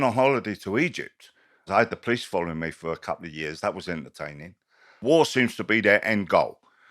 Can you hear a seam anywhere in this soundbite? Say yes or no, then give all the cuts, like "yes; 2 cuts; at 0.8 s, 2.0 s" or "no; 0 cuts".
yes; 2 cuts; at 1.7 s, 4.9 s